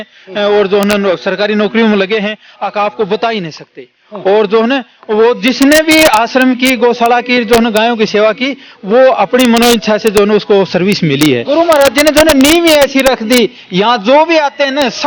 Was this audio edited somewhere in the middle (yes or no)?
yes